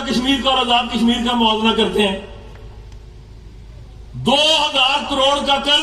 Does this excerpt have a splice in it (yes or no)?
no